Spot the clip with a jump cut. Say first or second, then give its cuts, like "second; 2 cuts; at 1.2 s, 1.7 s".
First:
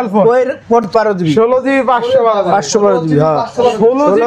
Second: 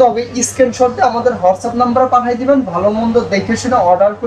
first; 1 cut; at 0.9 s